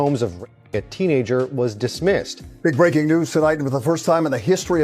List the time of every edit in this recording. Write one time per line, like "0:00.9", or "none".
0:02.4